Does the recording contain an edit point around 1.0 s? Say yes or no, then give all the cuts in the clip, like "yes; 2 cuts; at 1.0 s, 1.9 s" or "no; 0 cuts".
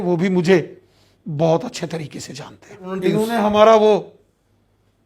no; 1 cut; at 2.9 s